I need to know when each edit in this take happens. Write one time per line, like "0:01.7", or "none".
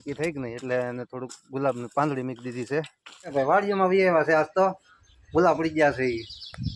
0:03.3